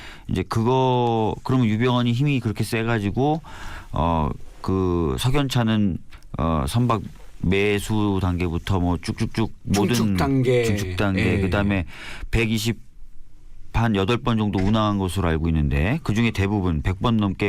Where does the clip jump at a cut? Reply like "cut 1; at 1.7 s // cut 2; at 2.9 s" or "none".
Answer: cut 1; at 4.5 s